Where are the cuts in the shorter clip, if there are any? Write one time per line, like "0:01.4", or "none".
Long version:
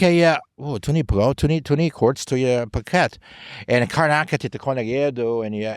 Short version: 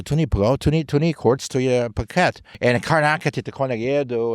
0:02.5